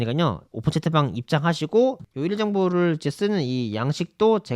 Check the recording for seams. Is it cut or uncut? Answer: cut